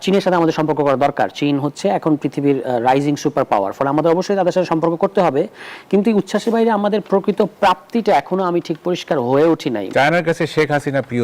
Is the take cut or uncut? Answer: cut